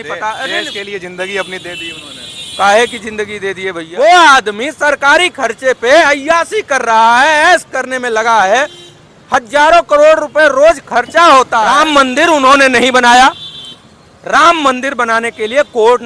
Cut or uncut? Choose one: cut